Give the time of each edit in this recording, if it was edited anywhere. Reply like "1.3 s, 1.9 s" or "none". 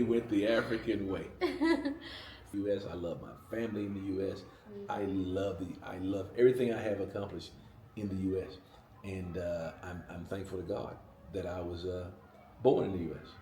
2.5 s